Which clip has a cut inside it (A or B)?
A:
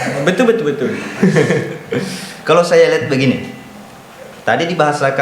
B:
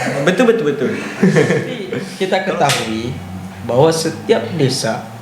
B